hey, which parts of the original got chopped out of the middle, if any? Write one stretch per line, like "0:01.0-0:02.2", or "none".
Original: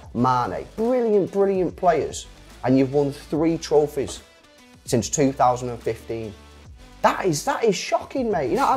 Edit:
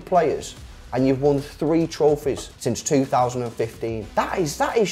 0:04.2-0:04.8
0:06.3-0:06.9